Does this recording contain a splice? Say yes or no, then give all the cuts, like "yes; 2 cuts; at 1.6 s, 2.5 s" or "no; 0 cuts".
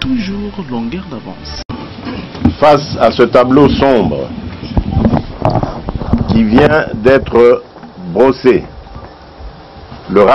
yes; 1 cut; at 1.4 s